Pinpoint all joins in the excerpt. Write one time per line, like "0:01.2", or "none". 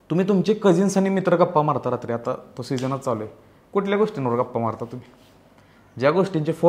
none